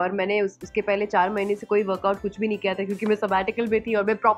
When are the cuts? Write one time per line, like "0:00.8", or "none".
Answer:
none